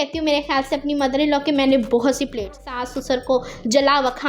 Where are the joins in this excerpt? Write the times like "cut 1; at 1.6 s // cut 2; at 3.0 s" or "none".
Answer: cut 1; at 2.6 s